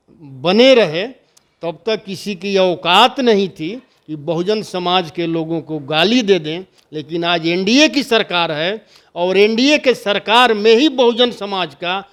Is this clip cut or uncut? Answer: uncut